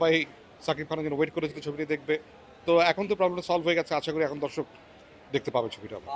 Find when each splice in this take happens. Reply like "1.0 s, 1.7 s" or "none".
none